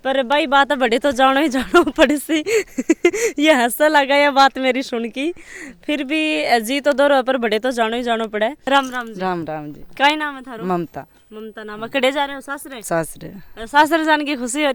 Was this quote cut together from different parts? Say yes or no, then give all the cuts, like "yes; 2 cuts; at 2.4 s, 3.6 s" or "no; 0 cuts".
no; 0 cuts